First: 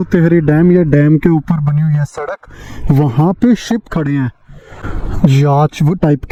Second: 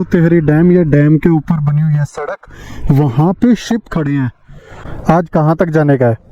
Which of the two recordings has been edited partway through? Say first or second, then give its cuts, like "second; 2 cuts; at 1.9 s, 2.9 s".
second; 1 cut; at 4.9 s